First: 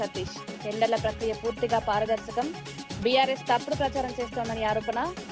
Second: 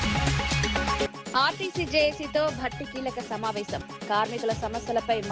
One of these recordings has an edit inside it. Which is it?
second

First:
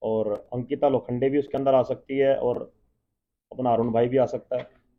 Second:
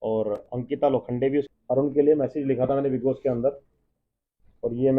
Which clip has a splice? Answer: second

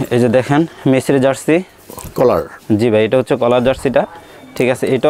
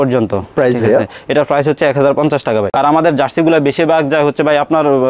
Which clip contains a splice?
second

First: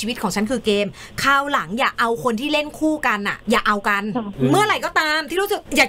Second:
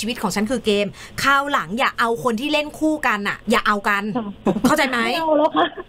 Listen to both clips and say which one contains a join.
first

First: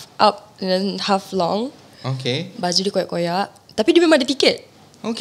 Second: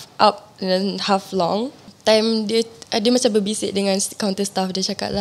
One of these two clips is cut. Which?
second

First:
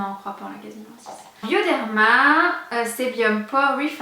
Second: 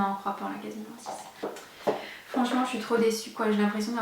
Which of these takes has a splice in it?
second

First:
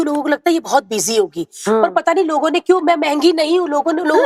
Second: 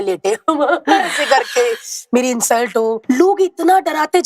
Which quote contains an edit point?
second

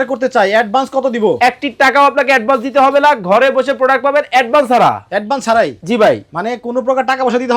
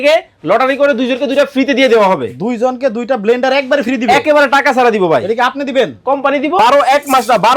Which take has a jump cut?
second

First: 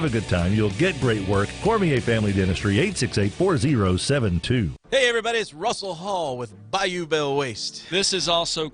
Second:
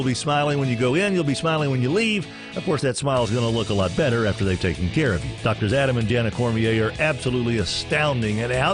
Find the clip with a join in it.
first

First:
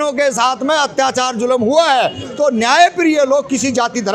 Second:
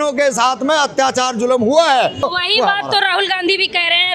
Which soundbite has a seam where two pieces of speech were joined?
second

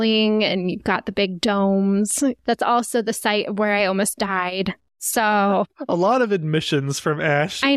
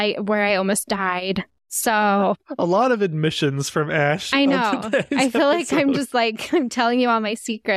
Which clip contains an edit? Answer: first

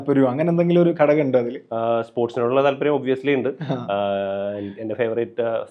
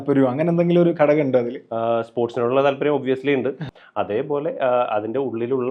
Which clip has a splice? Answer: second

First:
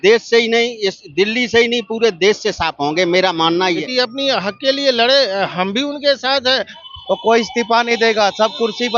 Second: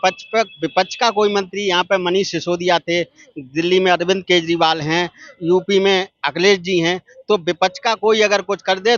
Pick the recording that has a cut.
first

